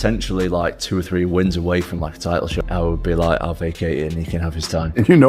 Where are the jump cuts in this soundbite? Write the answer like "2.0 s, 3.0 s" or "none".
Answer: 2.5 s